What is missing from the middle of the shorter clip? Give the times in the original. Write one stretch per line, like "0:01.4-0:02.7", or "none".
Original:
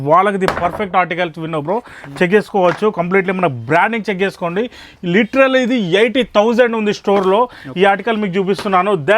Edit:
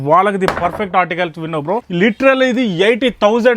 0:01.9-0:05.0